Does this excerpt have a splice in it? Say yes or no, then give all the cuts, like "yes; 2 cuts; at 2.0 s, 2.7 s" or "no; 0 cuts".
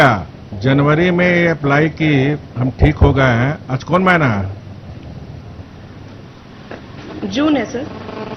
no; 0 cuts